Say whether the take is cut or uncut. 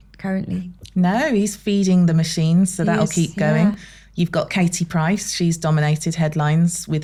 uncut